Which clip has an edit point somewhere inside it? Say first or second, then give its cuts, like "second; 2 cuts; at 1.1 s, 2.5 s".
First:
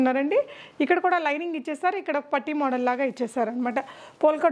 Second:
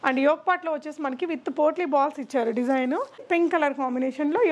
second; 1 cut; at 3.2 s